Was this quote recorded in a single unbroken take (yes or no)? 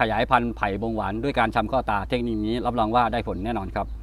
yes